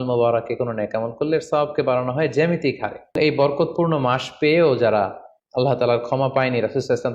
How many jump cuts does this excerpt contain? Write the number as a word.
one